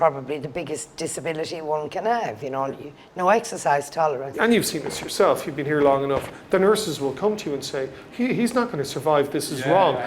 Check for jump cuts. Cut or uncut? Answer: cut